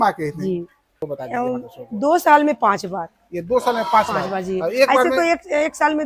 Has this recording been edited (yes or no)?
yes